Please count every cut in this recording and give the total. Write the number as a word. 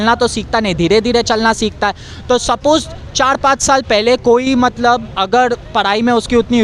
zero